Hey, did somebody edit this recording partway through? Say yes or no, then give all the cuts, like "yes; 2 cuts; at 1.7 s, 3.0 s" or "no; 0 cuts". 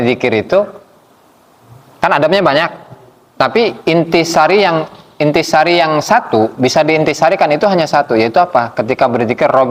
no; 0 cuts